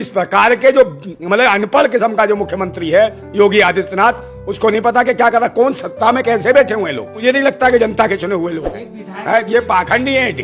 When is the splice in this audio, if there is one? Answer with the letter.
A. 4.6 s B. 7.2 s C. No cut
B